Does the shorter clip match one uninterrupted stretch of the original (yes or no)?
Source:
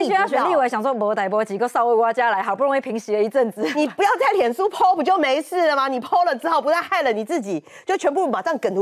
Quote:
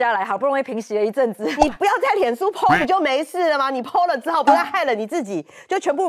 yes